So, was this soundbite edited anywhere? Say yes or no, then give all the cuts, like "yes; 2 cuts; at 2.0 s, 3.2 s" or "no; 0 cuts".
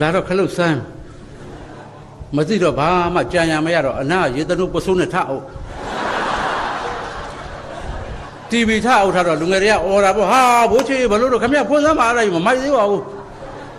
no; 0 cuts